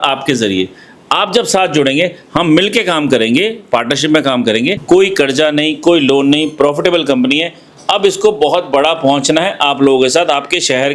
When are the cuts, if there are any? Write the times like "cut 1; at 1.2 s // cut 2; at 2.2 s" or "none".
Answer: cut 1; at 4.8 s